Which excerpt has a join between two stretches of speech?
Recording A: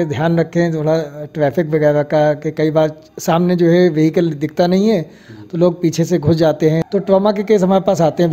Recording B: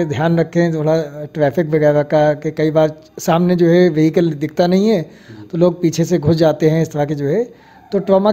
A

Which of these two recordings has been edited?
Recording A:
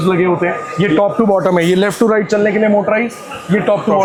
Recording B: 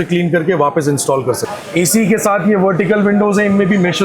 B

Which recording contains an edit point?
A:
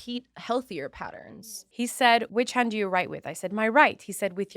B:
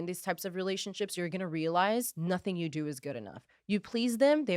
A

